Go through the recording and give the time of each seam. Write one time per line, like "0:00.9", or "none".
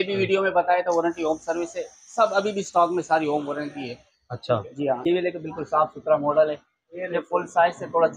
0:05.1